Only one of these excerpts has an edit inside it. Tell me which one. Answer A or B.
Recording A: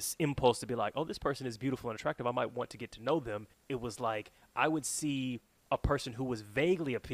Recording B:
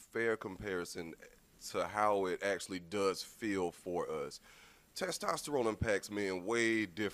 A